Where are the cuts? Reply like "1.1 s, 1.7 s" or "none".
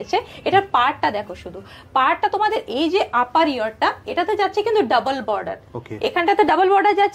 none